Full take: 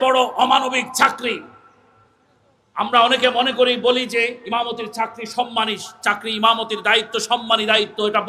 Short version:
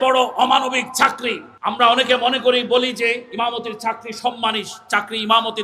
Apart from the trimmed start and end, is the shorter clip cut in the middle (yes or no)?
yes